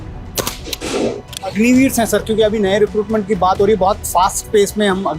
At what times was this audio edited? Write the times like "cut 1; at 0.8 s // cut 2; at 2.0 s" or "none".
cut 1; at 1.3 s